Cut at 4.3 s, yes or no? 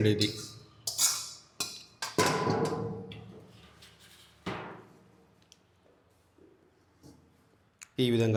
no